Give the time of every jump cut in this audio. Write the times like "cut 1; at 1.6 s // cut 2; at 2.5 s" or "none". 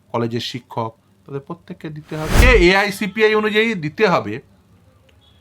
cut 1; at 2.4 s